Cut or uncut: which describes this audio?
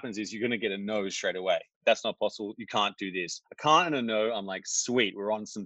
cut